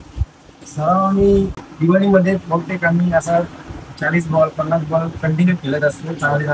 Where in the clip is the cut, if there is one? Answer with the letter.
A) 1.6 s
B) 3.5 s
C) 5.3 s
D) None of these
A